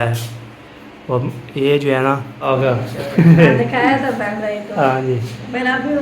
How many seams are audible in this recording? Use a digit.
1